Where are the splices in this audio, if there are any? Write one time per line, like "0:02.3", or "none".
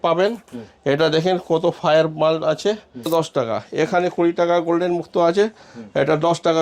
0:03.1